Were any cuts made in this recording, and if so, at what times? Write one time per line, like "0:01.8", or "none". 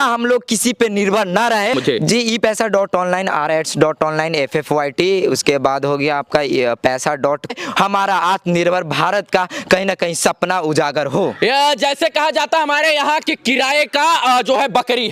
none